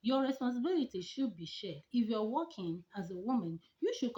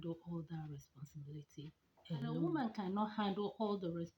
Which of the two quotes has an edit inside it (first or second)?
second